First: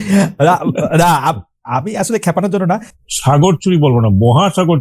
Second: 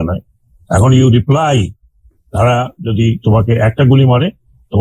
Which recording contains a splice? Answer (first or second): first